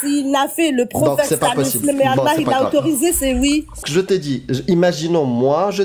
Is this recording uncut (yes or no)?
no